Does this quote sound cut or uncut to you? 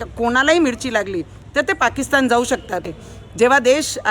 cut